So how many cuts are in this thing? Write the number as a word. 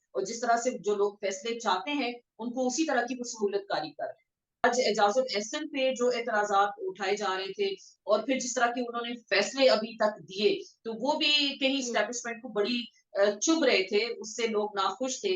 two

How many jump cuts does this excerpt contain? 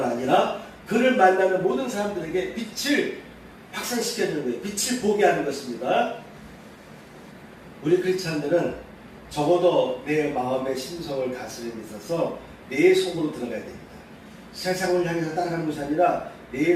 one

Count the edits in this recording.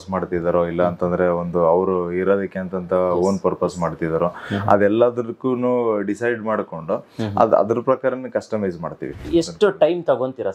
one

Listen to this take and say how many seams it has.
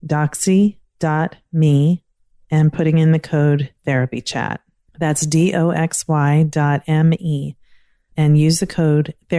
one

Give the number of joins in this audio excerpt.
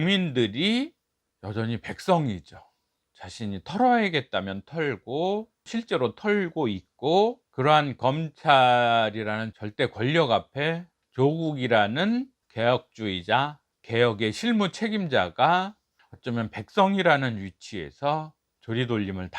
two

